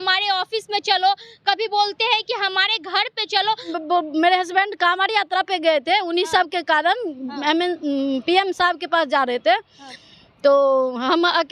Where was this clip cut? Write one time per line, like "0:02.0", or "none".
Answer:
0:03.7